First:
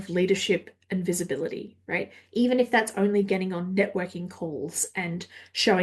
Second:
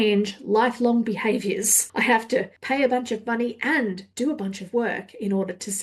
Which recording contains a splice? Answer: second; 3 cuts; at 1.8 s, 2.6 s, 4.1 s

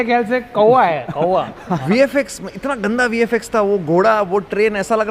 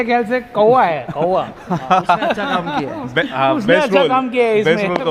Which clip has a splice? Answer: first; 1 cut; at 1.8 s

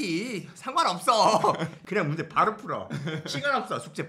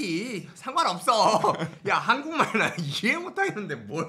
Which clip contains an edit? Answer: first; 1 cut; at 1.7 s

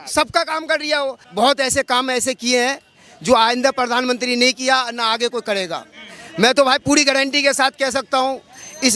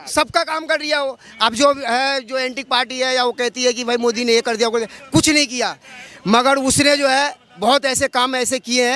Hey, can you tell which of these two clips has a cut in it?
first; 1 cut; at 1.2 s

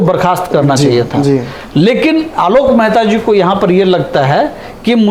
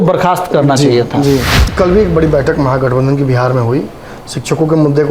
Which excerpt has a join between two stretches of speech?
second; 1 cut; at 1.6 s

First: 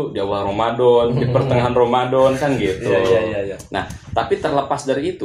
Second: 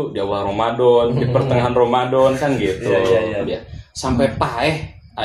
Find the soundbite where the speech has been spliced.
second; 1 cut; at 3.5 s

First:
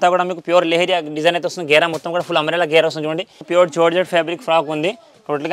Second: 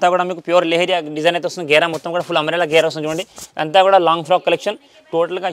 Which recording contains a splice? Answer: first; 1 cut; at 3.4 s

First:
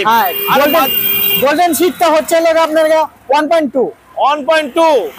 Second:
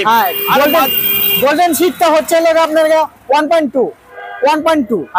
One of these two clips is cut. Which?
second; 1 cut; at 4.1 s

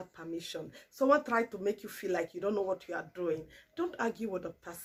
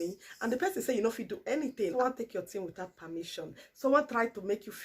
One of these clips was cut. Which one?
second; 1 cut; at 1.9 s

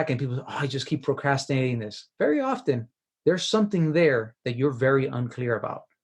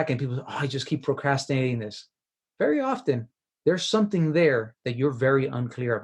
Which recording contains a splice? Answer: first; 1 cut; at 2.0 s

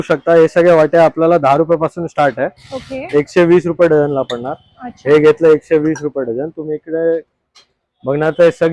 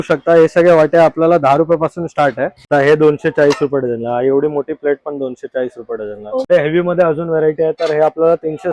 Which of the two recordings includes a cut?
second; 2 cuts; at 2.6 s, 6.5 s

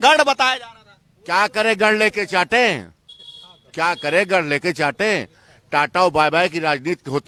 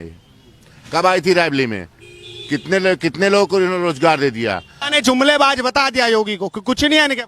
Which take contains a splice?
second; 1 cut; at 4.8 s

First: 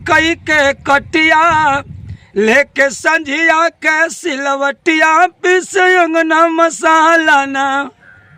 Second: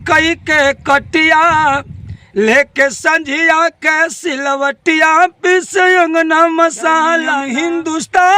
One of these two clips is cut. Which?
second; 1 cut; at 7.3 s

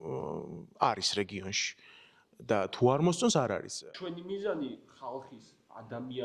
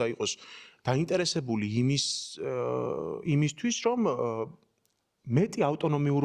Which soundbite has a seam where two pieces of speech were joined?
first; 1 cut; at 3.8 s

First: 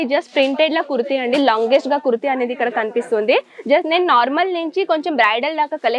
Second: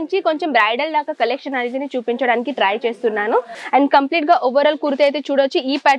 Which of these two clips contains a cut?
second; 1 cut; at 3.5 s

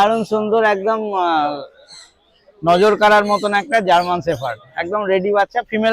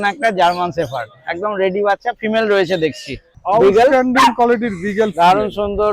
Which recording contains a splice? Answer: second; 1 cut; at 3.4 s

